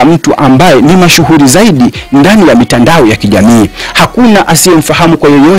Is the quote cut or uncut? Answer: uncut